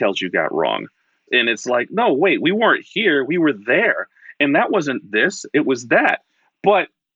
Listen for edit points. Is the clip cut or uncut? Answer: cut